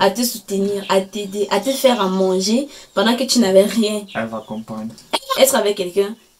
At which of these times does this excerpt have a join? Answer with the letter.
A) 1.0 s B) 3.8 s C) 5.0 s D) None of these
C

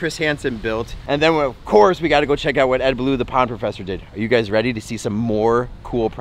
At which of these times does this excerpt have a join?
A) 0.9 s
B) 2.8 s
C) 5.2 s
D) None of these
A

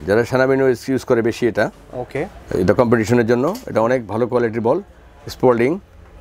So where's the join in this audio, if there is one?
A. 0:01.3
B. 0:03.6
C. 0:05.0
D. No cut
D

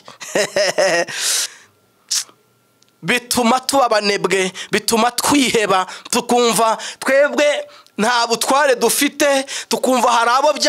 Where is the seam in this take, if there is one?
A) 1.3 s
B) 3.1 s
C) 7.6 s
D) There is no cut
A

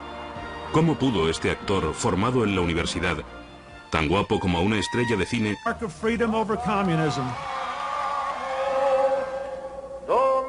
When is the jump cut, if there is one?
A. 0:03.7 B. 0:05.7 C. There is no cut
C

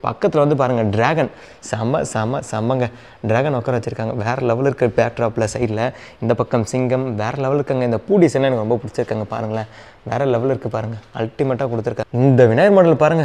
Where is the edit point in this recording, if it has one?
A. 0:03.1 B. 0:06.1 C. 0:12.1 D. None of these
C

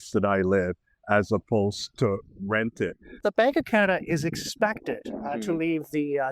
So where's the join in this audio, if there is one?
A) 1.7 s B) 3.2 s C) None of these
B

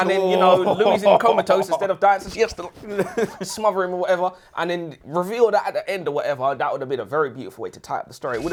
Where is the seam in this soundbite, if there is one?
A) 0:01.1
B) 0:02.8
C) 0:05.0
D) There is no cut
D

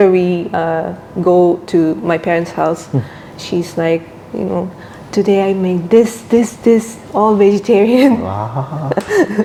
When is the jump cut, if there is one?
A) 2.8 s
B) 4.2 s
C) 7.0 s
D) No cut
D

